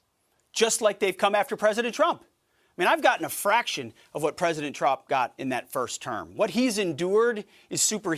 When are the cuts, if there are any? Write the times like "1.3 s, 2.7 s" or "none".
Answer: none